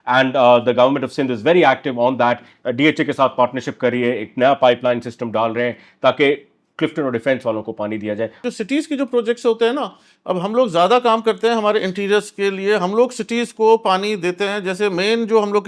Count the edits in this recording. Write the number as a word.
one